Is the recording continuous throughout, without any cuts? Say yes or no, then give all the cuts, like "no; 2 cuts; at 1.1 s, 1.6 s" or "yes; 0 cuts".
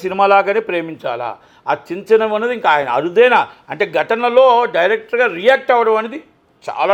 yes; 0 cuts